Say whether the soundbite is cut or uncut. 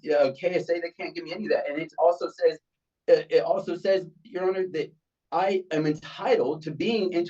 uncut